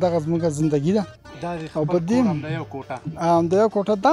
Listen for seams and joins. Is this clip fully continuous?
yes; 0 cuts

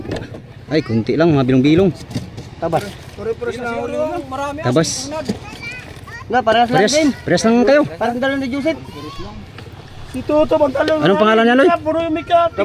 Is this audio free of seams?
yes; 0 cuts

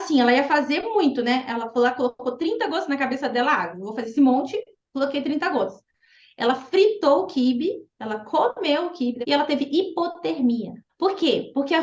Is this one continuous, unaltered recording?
no; 2 cuts; at 9.2 s, 10.8 s

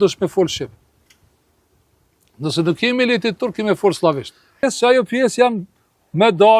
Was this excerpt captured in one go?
no; 1 cut; at 4.6 s

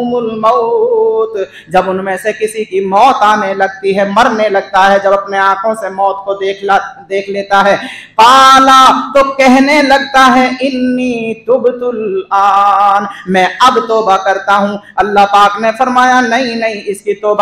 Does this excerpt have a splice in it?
no; 0 cuts

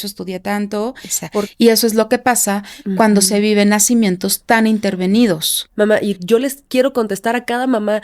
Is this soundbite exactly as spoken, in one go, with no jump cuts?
no; 2 cuts; at 1.5 s, 5.7 s

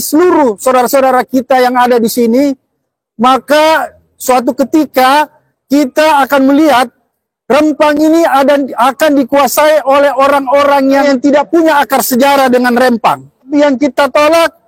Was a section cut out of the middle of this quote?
yes; 2 cuts; at 11.0 s, 13.5 s

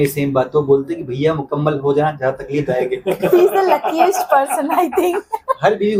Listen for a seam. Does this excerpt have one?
no; 0 cuts

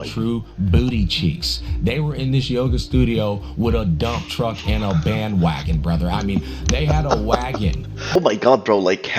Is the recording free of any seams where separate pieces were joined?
no; 1 cut; at 8.2 s

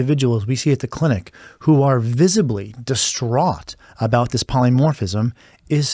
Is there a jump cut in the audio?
no; 0 cuts

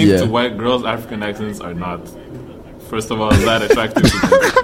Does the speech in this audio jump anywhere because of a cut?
no; 0 cuts

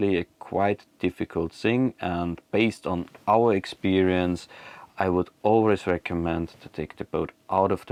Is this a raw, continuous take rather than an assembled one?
yes; 0 cuts

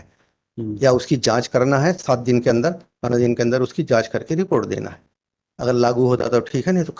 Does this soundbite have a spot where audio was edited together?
no; 0 cuts

